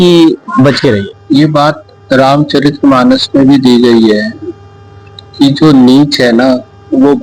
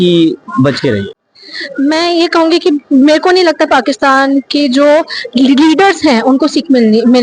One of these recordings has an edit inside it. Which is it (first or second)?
first